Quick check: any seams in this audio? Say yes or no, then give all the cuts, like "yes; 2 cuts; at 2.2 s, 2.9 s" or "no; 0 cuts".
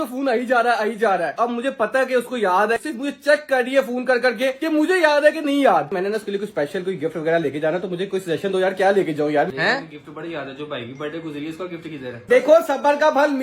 yes; 5 cuts; at 1.3 s, 2.8 s, 5.9 s, 9.5 s, 12.1 s